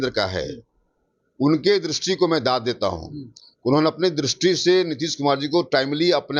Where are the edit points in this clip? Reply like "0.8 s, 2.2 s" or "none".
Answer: none